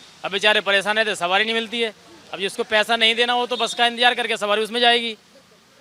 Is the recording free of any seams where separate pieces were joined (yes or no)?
yes